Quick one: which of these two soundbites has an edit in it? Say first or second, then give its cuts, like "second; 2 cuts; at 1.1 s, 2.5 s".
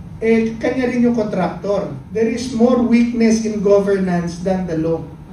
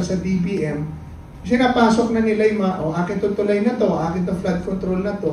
first; 1 cut; at 2.0 s